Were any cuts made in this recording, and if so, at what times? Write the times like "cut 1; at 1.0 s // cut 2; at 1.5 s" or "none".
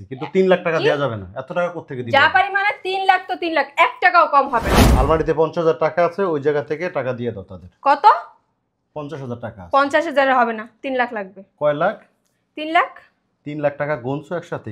cut 1; at 4.8 s